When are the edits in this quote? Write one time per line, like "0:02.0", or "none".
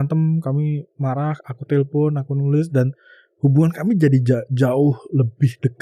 none